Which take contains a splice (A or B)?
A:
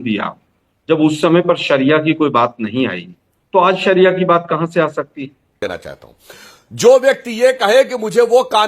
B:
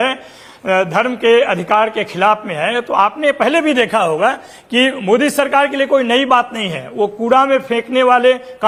A